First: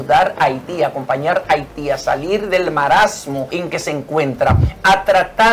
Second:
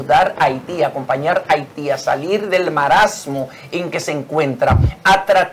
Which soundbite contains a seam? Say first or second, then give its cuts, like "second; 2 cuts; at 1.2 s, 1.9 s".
first; 1 cut; at 3.5 s